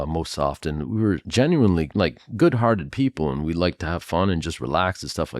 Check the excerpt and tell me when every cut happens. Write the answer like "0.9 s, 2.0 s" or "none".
1.2 s, 1.9 s

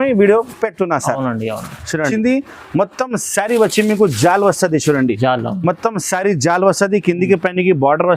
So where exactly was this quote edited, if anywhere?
2.1 s

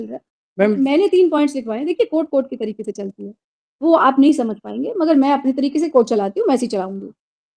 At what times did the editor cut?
none

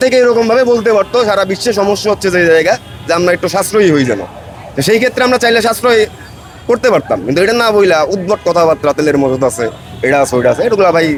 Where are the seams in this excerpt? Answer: none

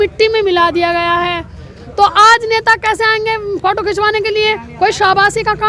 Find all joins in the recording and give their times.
none

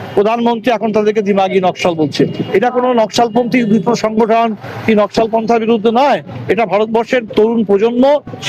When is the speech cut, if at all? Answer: none

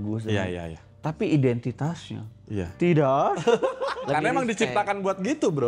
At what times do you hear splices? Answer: 4.0 s

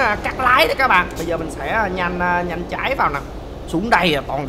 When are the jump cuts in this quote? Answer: none

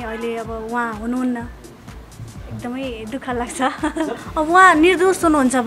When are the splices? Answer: 4.2 s

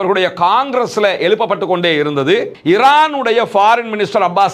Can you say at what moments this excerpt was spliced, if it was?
2.5 s

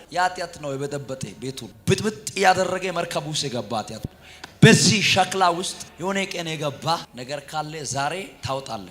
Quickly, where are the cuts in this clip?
1.7 s, 5.8 s, 7.1 s

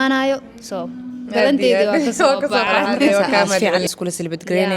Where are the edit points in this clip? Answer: 3.7 s

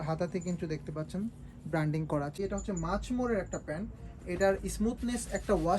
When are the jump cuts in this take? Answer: 2.4 s

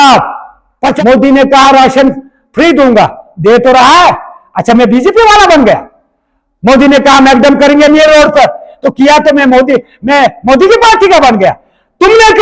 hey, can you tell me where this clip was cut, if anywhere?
0.9 s

